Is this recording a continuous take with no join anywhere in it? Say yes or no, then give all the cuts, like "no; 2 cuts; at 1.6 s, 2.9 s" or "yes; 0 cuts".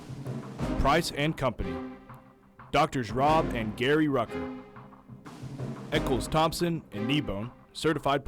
yes; 0 cuts